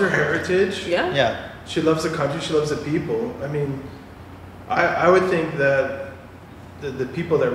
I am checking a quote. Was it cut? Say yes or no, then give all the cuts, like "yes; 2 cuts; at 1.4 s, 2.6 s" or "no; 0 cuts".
no; 0 cuts